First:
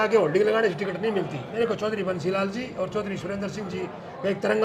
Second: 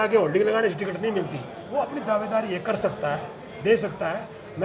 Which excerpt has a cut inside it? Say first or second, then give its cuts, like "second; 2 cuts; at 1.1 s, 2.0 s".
first; 1 cut; at 1.4 s